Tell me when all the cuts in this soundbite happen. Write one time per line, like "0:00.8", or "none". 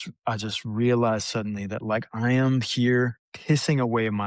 0:03.3